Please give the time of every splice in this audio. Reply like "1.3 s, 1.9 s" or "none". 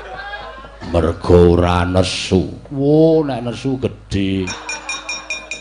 4.5 s